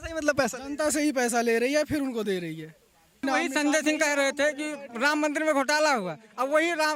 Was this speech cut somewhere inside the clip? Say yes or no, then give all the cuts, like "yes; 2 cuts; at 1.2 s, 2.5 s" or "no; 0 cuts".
yes; 1 cut; at 3.2 s